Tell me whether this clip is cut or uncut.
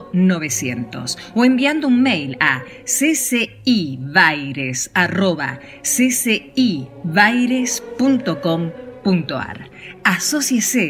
uncut